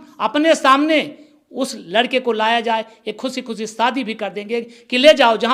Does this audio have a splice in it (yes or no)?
no